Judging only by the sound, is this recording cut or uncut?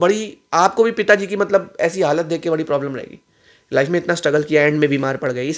uncut